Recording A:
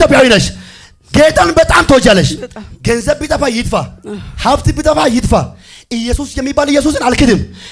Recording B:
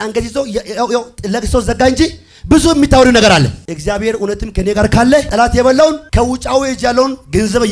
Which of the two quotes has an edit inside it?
B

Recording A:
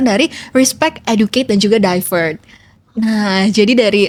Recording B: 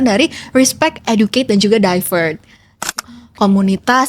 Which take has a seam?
B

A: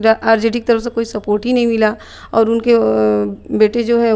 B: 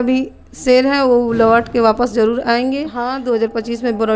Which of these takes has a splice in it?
B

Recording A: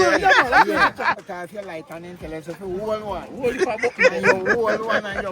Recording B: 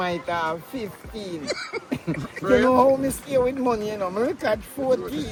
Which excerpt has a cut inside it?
A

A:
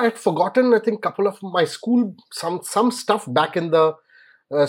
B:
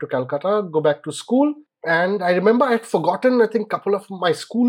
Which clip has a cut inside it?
B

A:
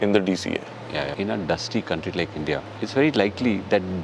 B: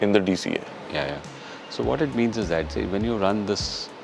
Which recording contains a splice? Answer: A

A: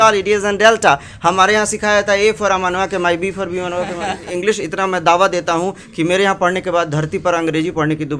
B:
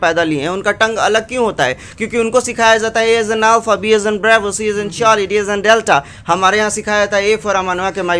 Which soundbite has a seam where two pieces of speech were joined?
A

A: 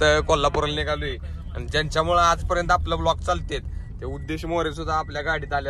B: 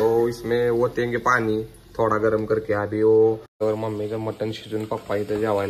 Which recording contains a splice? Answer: B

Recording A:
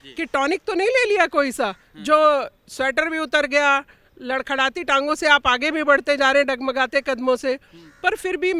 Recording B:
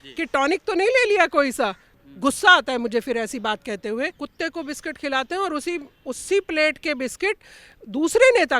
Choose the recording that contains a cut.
B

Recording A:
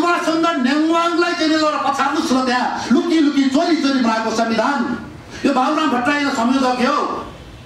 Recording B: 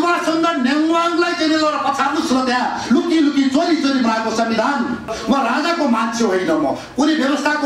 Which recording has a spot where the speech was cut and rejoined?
B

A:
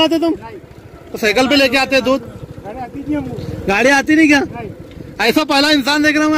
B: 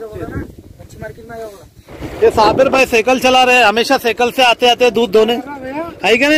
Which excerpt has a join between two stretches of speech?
B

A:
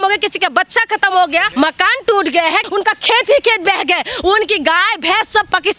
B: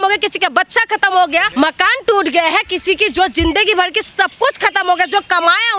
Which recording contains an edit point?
A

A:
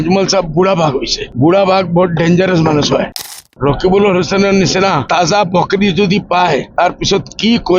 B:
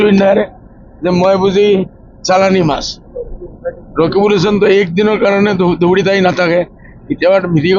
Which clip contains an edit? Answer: A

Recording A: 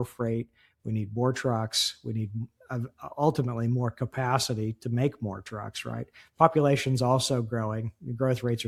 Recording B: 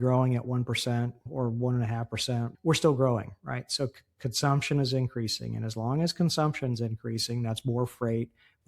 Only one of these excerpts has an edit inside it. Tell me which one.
B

